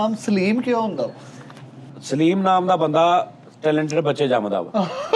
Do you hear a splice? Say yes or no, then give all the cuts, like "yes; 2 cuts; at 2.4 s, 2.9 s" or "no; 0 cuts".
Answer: yes; 1 cut; at 2.0 s